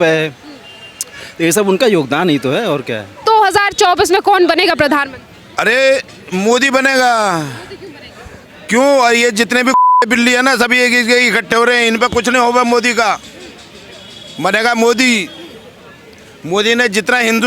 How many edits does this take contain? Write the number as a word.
one